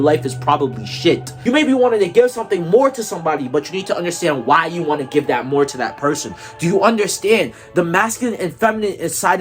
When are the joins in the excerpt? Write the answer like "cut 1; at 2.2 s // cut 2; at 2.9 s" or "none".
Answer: cut 1; at 1.3 s

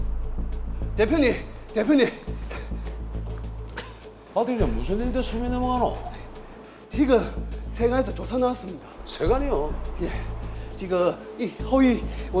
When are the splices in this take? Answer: cut 1; at 1.0 s

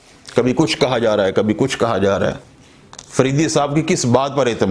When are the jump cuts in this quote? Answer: none

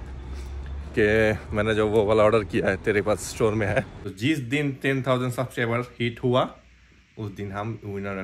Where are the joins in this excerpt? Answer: cut 1; at 4.0 s

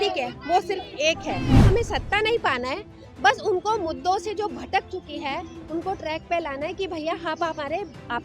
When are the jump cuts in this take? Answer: cut 1; at 1.6 s

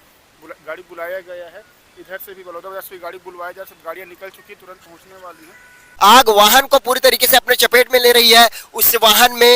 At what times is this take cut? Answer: cut 1; at 5.9 s

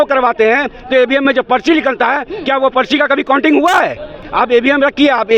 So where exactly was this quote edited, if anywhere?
cut 1; at 4.2 s

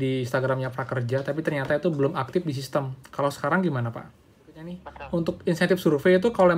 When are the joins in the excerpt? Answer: cut 1; at 4.9 s

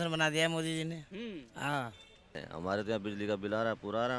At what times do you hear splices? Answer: cut 1; at 2.5 s

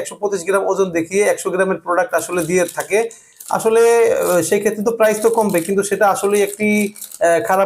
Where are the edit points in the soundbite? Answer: none

